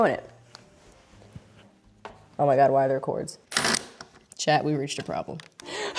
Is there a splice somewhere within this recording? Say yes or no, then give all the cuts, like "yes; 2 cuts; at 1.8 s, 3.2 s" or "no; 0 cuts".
yes; 1 cut; at 3.4 s